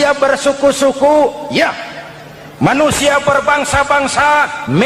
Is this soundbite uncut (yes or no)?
yes